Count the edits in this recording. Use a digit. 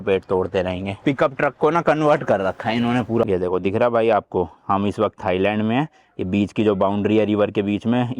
2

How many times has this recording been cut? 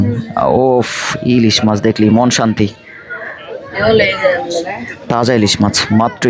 0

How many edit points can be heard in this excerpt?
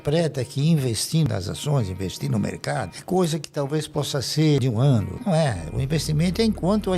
2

